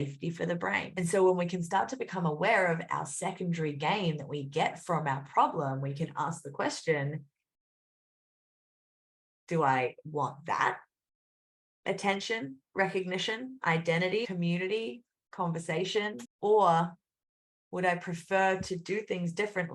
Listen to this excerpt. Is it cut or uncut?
cut